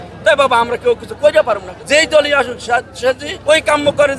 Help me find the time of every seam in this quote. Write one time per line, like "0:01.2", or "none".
0:01.7
0:03.3